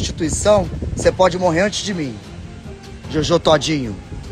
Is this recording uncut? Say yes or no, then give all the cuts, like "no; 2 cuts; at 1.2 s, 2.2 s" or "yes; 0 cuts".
yes; 0 cuts